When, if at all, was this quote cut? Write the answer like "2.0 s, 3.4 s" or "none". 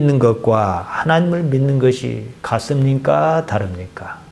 none